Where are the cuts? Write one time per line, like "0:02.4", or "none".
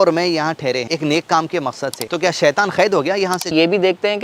0:00.9
0:02.0
0:03.5